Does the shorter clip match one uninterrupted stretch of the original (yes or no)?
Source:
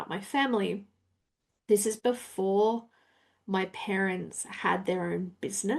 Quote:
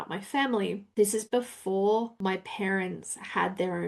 no